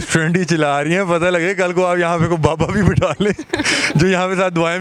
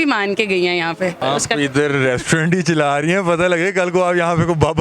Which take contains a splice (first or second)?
second